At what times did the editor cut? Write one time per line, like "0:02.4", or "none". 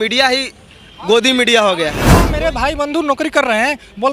0:02.1